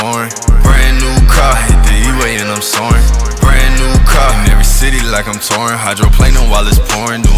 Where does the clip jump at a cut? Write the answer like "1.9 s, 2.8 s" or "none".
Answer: none